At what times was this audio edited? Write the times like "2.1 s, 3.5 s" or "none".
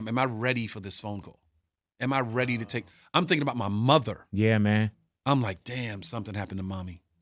none